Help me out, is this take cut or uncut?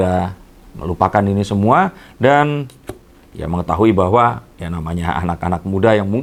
uncut